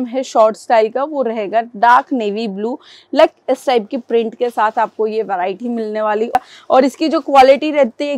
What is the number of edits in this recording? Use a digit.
1